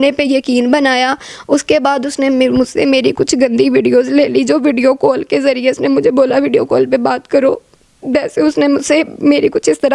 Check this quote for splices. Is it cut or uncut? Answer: uncut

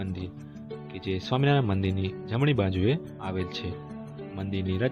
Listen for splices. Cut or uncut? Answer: uncut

